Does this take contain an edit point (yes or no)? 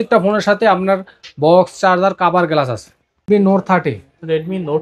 yes